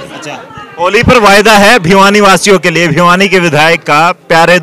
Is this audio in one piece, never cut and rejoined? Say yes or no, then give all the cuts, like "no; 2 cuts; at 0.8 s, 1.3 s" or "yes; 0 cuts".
yes; 0 cuts